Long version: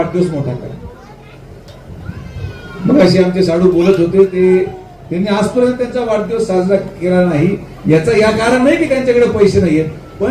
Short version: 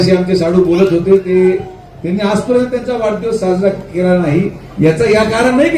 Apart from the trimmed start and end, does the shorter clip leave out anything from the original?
no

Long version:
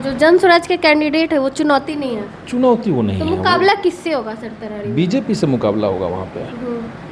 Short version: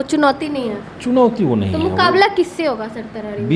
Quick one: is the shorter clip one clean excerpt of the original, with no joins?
yes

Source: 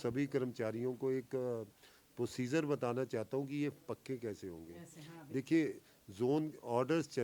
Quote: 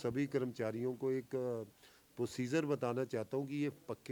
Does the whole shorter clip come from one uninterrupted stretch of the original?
yes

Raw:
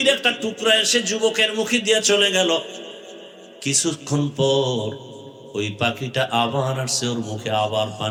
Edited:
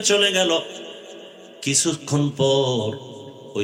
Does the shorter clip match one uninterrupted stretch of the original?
yes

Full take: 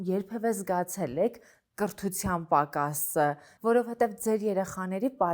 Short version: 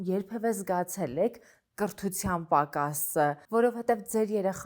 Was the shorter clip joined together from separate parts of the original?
yes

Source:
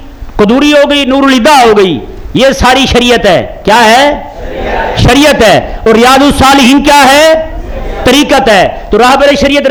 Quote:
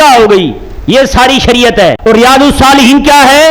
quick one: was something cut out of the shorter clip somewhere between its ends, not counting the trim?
yes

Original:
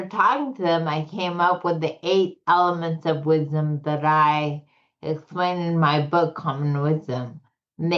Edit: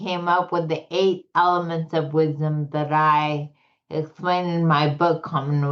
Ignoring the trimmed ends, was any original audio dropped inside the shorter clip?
no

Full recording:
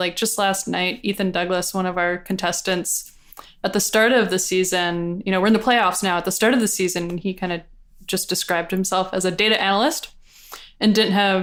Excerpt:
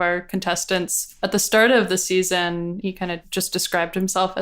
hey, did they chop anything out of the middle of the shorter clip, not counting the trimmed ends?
yes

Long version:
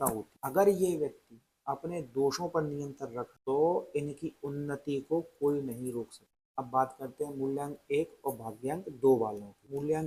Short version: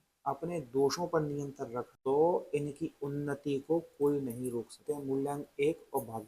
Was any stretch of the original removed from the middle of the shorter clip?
yes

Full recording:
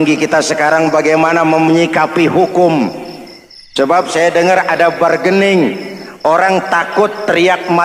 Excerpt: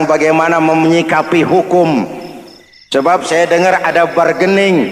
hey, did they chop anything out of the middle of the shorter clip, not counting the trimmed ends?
no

